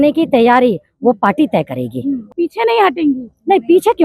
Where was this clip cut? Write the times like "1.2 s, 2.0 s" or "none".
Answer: 2.2 s